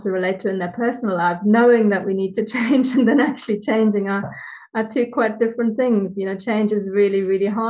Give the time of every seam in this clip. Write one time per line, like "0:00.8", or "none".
none